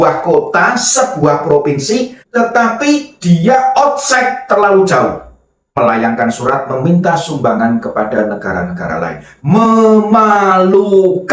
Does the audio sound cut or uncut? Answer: uncut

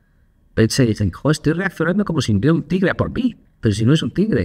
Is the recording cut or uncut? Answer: cut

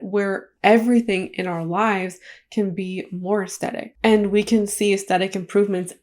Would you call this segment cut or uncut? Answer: cut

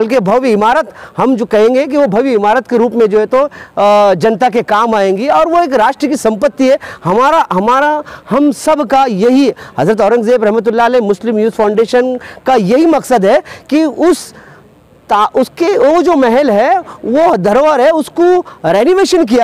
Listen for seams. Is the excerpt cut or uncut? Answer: uncut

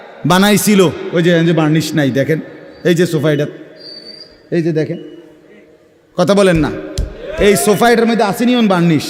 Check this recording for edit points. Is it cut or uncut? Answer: uncut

